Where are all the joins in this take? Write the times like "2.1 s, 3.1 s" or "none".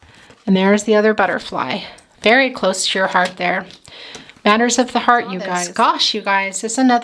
5.6 s

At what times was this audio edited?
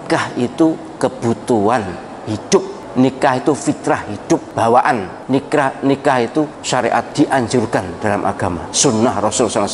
2.8 s, 4.5 s, 5.1 s, 7.0 s, 8.7 s

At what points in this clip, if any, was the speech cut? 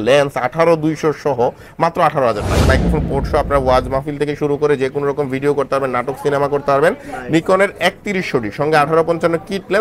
2.6 s

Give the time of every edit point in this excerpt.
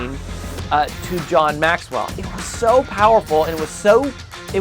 2.2 s

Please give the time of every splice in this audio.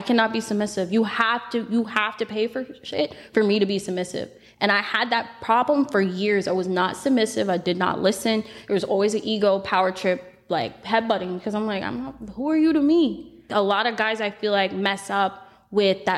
13.5 s

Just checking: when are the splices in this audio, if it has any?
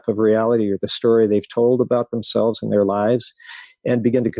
none

